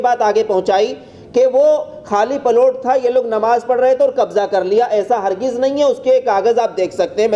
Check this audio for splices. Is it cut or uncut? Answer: uncut